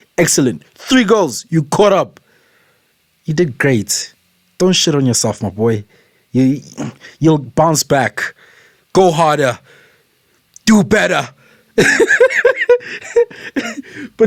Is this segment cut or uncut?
uncut